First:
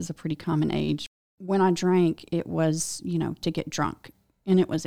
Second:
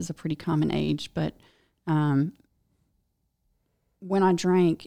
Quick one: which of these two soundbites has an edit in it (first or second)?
first